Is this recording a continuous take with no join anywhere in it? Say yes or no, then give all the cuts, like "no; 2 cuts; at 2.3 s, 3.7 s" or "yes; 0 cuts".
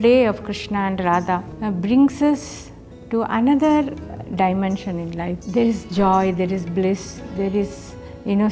no; 2 cuts; at 1.5 s, 5.4 s